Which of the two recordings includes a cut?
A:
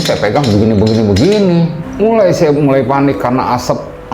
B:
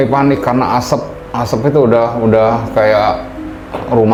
A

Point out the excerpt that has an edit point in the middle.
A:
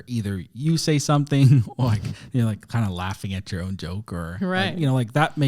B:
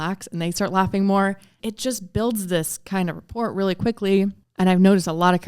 B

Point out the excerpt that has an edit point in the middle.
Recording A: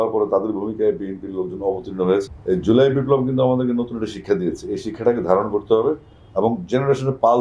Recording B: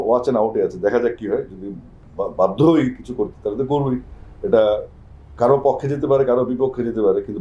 A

